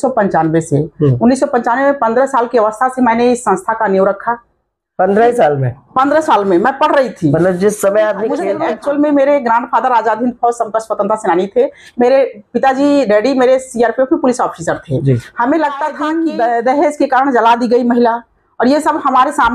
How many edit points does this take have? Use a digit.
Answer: 2